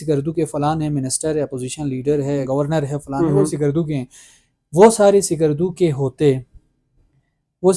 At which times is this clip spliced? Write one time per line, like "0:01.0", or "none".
0:02.4